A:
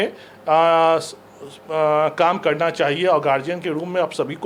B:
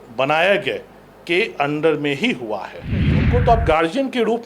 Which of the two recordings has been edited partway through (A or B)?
B